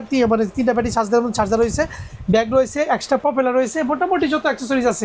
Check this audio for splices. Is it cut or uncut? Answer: uncut